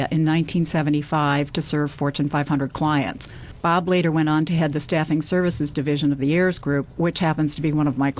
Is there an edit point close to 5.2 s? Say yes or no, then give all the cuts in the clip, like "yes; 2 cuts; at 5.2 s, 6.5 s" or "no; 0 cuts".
yes; 1 cut; at 5.2 s